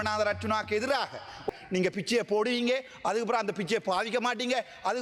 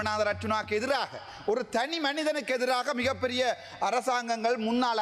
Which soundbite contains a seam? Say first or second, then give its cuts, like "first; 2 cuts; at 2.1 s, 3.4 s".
first; 1 cut; at 1.4 s